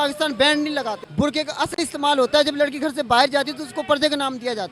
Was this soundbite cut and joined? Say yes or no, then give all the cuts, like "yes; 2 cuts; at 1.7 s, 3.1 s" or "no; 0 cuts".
yes; 1 cut; at 1.0 s